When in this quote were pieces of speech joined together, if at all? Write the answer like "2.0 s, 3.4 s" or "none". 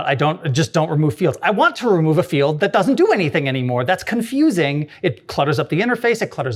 none